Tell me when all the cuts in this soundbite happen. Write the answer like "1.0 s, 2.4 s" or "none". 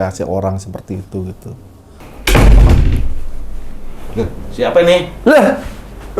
2.3 s